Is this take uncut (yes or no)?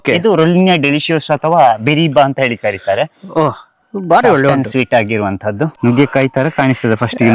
no